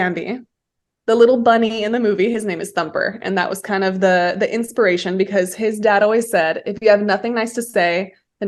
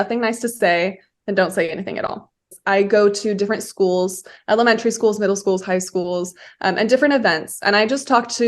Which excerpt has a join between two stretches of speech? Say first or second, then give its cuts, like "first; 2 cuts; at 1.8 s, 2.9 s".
second; 1 cut; at 2.6 s